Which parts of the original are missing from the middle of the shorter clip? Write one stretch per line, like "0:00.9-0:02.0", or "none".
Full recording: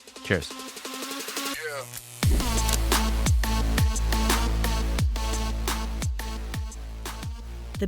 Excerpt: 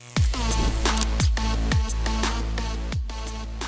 none